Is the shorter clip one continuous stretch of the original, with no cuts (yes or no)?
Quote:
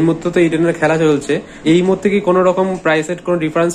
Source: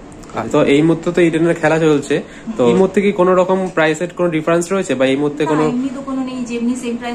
no